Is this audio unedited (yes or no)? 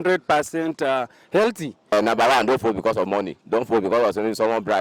no